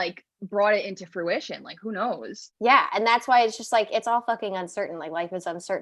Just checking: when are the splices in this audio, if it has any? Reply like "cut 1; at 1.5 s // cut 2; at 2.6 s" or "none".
cut 1; at 2.4 s